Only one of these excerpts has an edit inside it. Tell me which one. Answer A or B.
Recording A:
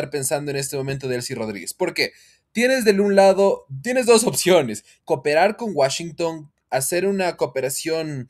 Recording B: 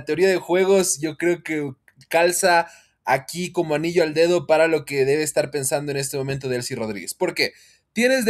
A